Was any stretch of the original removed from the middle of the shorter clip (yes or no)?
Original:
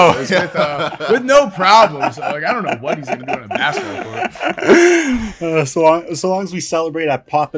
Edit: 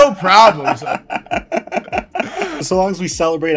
yes